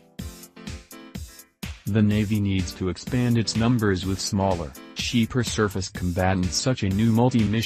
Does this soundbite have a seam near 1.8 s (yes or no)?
yes